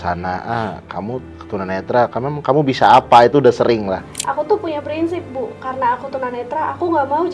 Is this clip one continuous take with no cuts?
no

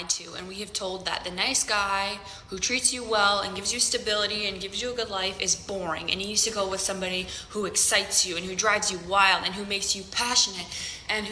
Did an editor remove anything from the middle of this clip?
no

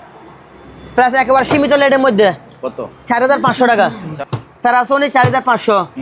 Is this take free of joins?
no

